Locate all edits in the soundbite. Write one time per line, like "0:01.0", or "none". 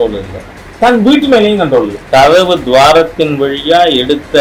0:02.0